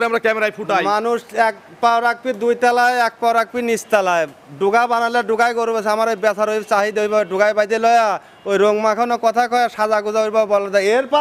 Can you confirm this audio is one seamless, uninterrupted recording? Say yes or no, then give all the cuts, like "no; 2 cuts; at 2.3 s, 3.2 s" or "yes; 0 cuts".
yes; 0 cuts